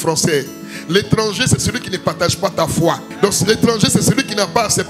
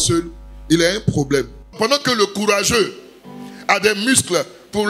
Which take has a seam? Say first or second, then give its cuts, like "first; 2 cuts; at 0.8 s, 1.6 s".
second; 1 cut; at 1.7 s